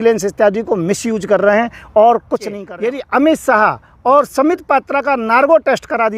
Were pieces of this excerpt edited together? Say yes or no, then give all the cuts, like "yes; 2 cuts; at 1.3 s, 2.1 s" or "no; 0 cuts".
yes; 1 cut; at 2.6 s